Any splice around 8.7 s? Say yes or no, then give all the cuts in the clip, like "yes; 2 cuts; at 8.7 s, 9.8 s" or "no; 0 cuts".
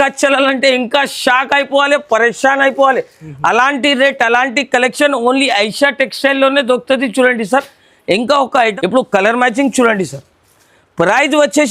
yes; 1 cut; at 8.7 s